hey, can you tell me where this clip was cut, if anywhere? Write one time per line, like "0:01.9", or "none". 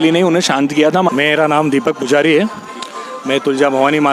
0:01.1